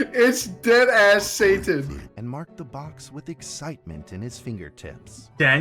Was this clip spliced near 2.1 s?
yes; 1 cut; at 2.1 s

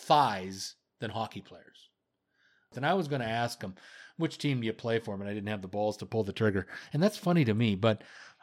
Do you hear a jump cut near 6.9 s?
no; 1 cut; at 2.7 s

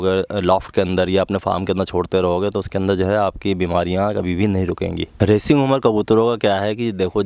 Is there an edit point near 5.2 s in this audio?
yes; 1 cut; at 5.2 s

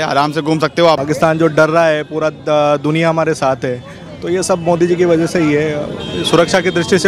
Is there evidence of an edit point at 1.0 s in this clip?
yes; 1 cut; at 1.0 s

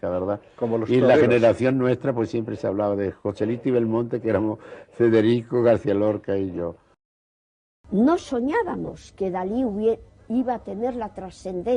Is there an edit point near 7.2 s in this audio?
yes; 1 cut; at 7.2 s

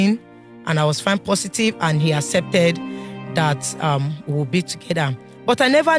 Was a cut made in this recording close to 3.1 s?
no; 0 cuts

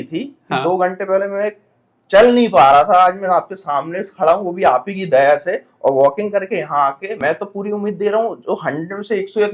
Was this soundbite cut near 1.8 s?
no; 1 cut; at 7.2 s

